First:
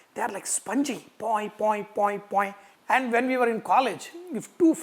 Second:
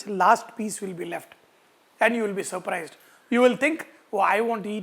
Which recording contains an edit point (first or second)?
first